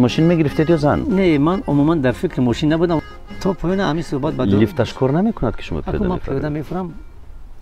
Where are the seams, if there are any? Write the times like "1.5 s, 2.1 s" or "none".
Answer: 3.0 s